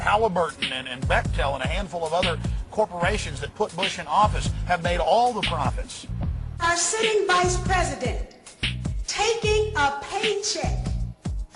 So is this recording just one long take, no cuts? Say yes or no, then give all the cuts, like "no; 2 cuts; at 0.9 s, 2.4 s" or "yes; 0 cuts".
no; 1 cut; at 1.7 s